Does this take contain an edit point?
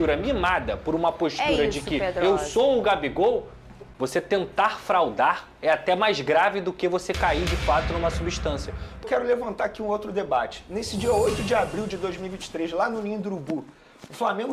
yes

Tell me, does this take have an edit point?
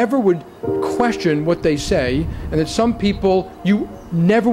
no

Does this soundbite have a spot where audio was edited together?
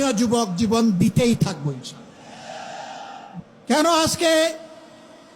yes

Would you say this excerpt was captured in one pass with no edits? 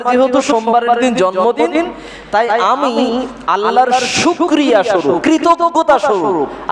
no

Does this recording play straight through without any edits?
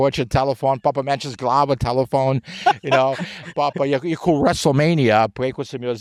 yes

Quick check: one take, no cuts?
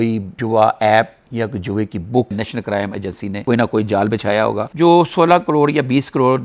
no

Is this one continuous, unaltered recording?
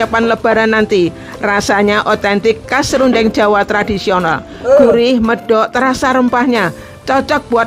yes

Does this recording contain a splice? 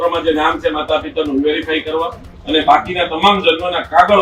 no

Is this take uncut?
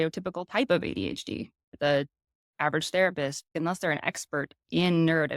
no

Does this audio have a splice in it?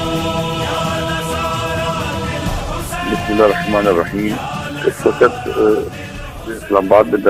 yes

